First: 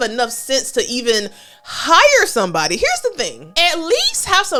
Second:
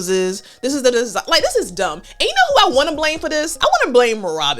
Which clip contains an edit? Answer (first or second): second